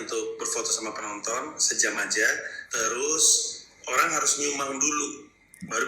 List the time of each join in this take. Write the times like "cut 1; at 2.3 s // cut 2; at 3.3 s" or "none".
cut 1; at 2.6 s